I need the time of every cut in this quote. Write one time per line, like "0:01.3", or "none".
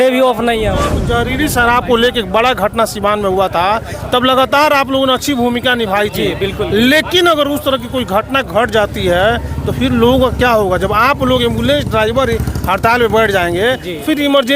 0:00.9